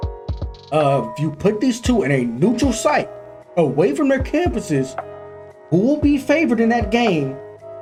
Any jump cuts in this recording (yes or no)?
no